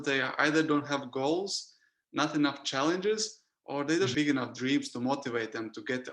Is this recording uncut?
no; 1 cut; at 4.1 s

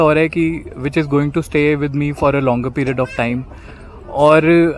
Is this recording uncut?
yes; 0 cuts

